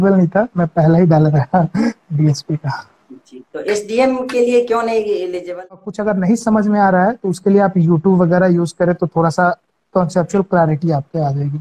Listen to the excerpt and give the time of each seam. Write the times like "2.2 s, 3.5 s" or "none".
5.9 s